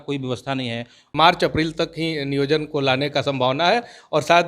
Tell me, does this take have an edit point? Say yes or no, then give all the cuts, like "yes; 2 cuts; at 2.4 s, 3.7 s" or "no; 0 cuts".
yes; 1 cut; at 1.0 s